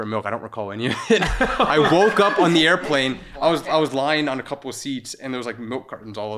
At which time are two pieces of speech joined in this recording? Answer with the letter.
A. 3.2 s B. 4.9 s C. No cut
C